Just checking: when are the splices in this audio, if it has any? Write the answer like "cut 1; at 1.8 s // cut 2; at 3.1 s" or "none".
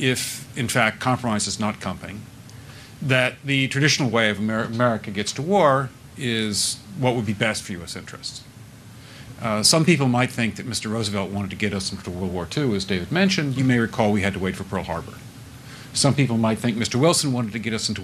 cut 1; at 8.7 s // cut 2; at 12.8 s